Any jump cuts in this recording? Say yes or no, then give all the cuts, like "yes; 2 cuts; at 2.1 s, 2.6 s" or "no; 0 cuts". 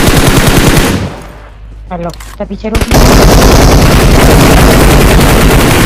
no; 0 cuts